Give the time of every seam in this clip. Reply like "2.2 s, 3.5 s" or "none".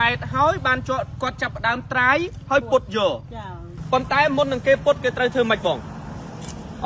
3.7 s